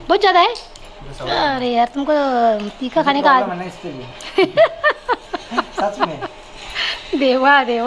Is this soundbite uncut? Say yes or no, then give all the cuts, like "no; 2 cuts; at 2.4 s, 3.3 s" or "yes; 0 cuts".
yes; 0 cuts